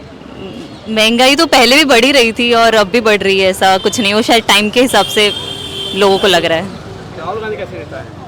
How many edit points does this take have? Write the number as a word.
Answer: zero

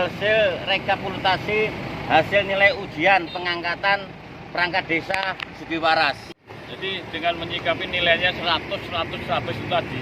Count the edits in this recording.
one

